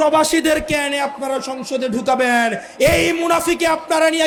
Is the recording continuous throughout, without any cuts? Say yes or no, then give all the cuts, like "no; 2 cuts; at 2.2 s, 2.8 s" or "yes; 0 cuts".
yes; 0 cuts